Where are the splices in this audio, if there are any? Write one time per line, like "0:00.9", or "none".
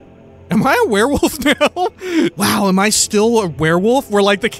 0:02.3